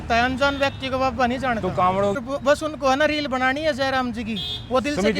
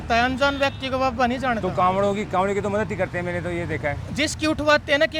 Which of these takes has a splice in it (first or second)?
first